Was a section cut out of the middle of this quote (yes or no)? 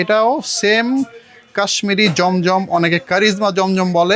no